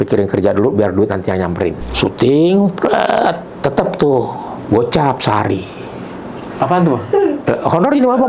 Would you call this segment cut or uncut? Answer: cut